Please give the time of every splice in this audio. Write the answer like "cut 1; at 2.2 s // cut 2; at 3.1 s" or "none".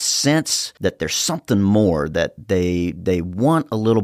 none